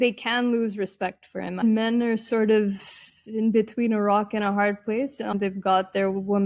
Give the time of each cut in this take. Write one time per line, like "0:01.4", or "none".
0:01.6
0:05.3